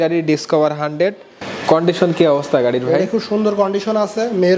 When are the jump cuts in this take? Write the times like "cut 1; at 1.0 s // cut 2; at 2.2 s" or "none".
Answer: cut 1; at 1.5 s